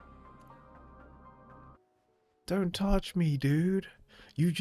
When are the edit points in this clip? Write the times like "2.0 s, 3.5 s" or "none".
1.7 s